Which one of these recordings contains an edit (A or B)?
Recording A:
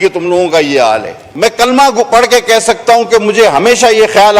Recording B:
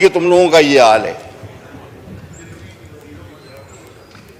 A